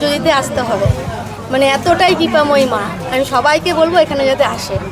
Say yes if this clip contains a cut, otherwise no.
no